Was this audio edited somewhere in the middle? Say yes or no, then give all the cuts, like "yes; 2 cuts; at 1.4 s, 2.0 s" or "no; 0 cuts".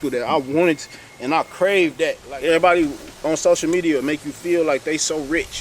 yes; 1 cut; at 2.2 s